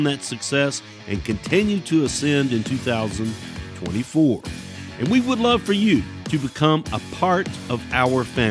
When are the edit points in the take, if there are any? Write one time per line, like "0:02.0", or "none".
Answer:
0:06.2
0:07.6